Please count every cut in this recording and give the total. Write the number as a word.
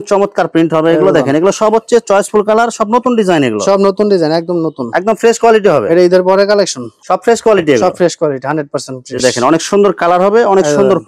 zero